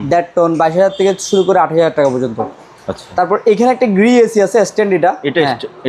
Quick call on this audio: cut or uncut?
uncut